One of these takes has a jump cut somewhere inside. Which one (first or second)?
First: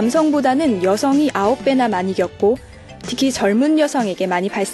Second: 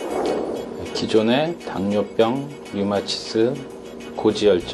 second